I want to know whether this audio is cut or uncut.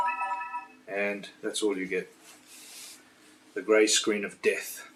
uncut